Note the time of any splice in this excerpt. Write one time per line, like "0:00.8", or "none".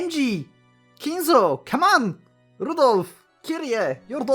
none